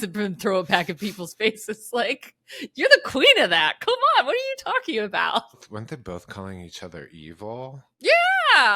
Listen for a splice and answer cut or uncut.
cut